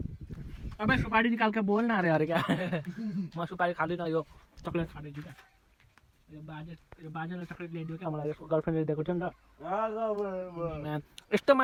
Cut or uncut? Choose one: uncut